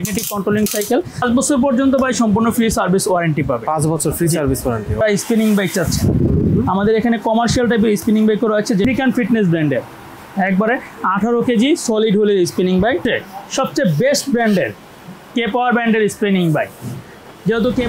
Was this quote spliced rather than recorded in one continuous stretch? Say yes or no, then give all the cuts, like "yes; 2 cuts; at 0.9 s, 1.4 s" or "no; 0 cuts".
yes; 4 cuts; at 1.2 s, 5.0 s, 8.9 s, 13.0 s